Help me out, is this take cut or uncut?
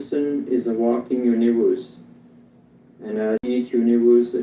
cut